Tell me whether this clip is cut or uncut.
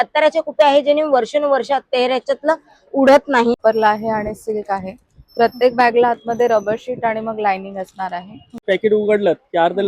cut